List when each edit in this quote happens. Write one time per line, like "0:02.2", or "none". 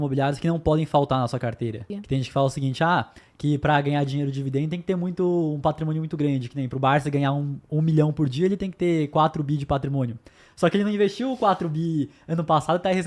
0:01.9